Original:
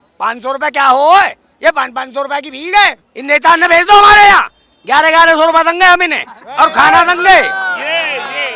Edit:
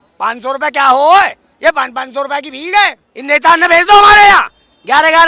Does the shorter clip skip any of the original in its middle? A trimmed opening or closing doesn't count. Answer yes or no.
no